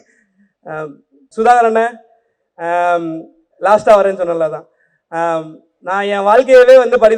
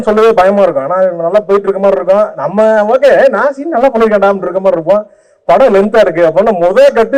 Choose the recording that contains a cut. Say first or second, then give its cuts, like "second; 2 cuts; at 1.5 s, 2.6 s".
first; 1 cut; at 1.2 s